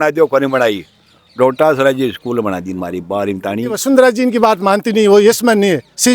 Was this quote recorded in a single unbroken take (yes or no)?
no